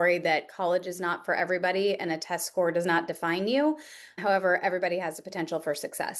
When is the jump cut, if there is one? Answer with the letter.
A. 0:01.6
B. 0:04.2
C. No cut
B